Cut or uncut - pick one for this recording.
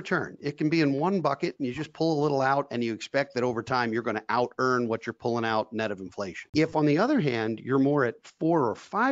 cut